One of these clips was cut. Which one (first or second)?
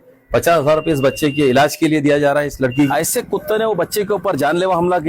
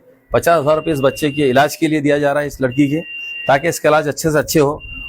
first